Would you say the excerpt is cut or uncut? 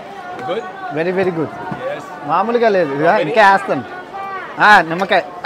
uncut